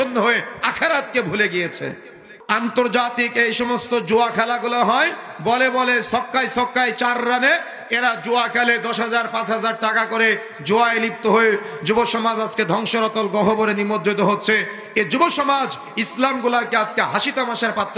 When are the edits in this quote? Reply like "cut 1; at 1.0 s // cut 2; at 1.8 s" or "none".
cut 1; at 2.3 s